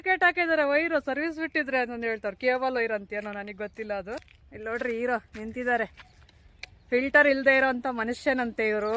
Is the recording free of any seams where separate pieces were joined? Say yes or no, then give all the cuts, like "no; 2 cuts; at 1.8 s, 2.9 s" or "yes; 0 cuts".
no; 1 cut; at 4.4 s